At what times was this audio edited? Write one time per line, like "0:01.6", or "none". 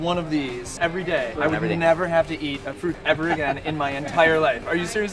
0:01.0
0:02.8